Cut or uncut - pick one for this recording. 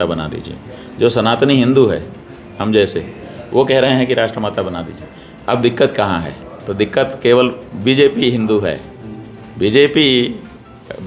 uncut